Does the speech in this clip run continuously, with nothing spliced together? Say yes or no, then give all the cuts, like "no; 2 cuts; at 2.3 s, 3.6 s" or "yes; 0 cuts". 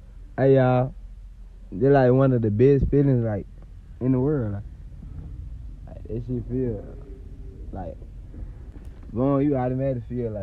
no; 1 cut; at 8.7 s